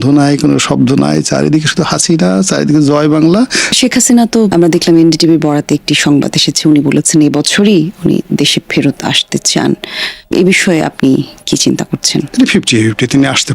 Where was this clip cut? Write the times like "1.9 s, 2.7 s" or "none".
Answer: 3.6 s